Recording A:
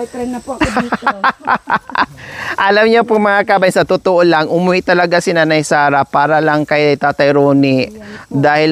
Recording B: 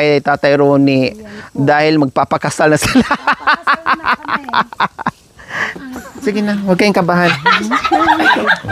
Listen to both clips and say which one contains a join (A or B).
B